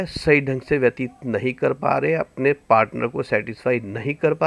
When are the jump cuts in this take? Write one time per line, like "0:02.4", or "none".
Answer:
none